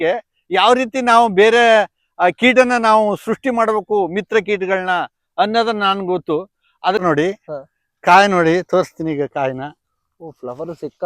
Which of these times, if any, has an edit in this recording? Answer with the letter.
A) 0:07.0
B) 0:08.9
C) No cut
A